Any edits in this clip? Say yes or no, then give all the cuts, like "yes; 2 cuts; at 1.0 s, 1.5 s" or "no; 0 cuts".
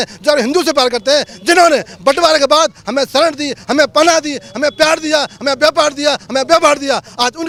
no; 0 cuts